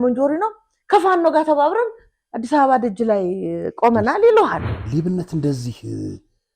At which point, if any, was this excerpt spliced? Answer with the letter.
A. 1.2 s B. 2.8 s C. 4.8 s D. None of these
C